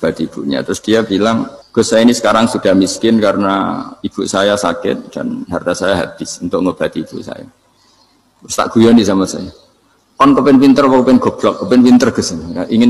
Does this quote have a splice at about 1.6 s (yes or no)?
yes